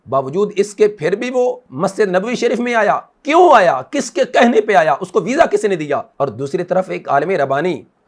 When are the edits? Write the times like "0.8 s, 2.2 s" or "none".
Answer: none